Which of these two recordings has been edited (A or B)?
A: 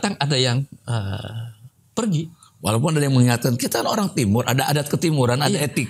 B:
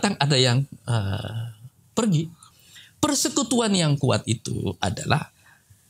B